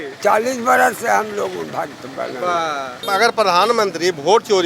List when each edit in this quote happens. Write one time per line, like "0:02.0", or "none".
0:03.0